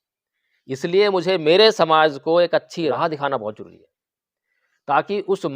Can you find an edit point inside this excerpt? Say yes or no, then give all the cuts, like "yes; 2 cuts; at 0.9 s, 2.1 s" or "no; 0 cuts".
yes; 1 cut; at 2.9 s